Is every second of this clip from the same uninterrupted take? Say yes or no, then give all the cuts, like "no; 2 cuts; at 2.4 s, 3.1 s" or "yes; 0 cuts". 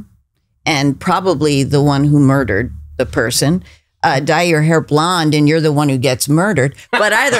yes; 0 cuts